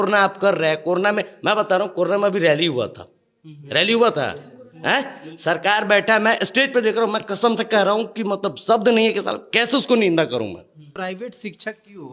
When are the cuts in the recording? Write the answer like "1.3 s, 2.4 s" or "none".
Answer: 11.0 s